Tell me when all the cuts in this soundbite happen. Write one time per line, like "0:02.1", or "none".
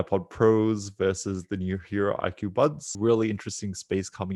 0:02.9